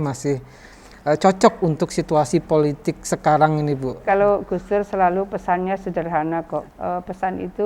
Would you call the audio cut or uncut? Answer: cut